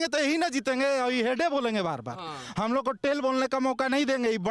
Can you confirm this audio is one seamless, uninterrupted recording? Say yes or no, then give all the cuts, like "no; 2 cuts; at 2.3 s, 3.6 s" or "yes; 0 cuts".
yes; 0 cuts